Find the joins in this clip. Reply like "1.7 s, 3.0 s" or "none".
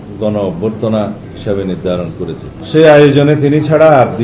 2.5 s